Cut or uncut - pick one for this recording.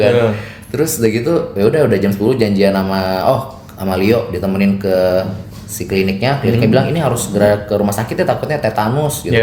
uncut